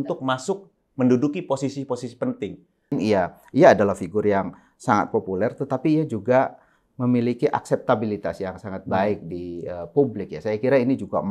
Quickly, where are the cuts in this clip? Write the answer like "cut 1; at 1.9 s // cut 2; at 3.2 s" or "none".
cut 1; at 3.0 s